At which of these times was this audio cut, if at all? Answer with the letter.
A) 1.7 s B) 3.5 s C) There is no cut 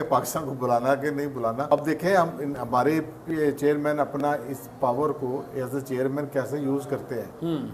A